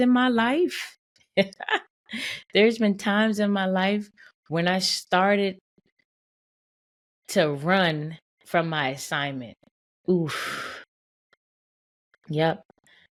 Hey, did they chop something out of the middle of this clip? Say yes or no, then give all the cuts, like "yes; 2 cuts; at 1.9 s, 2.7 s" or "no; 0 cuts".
no; 0 cuts